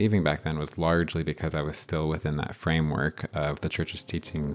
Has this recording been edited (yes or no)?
no